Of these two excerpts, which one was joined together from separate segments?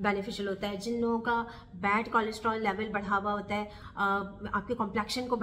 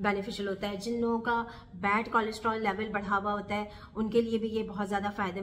first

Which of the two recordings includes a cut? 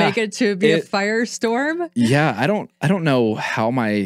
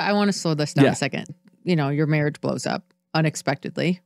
second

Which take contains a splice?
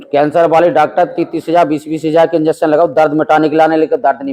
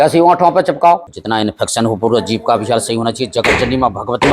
second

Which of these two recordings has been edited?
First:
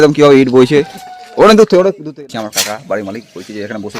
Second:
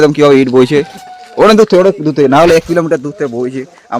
first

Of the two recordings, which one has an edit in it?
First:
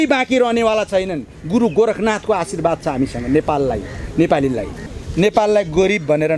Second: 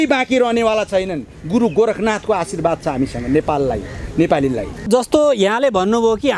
first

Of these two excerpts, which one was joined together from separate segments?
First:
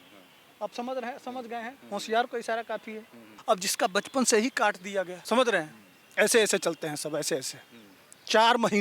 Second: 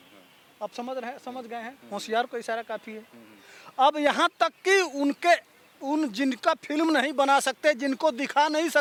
first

